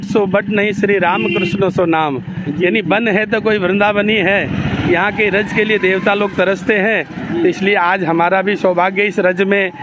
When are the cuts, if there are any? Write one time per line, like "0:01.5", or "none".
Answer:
none